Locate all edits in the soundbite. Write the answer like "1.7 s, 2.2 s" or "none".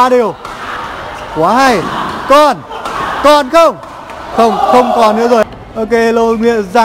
5.4 s